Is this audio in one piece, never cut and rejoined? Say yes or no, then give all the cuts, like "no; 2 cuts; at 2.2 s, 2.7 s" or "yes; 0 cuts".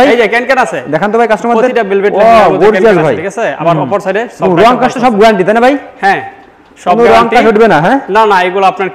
yes; 0 cuts